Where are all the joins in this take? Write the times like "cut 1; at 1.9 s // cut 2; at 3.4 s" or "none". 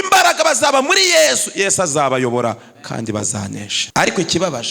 cut 1; at 3.8 s